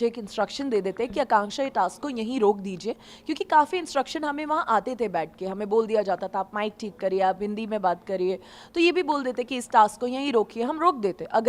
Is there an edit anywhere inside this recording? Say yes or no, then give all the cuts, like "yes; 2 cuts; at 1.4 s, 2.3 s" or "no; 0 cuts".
no; 0 cuts